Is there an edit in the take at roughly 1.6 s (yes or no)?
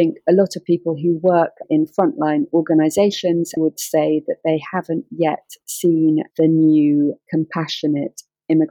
no